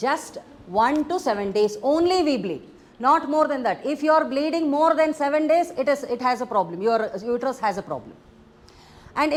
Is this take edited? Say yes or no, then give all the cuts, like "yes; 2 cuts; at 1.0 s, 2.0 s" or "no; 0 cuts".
no; 0 cuts